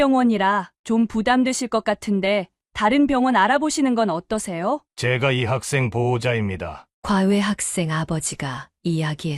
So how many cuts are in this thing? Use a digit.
1